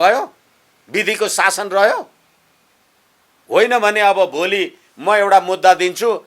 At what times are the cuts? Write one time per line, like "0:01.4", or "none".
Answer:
none